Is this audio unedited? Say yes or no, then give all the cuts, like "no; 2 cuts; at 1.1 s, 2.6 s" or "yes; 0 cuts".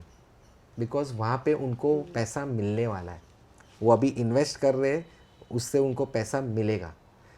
yes; 0 cuts